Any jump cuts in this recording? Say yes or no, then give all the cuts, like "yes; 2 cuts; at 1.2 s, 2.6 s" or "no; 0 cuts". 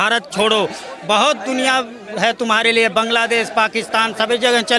no; 0 cuts